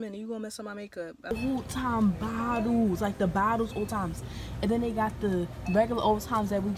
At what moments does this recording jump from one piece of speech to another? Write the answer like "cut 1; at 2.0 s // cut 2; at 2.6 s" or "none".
cut 1; at 1.2 s